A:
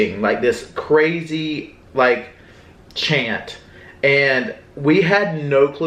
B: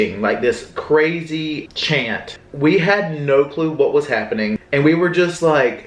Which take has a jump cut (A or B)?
B